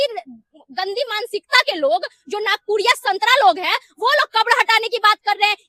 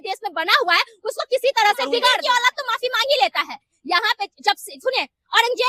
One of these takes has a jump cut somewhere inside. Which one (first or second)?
second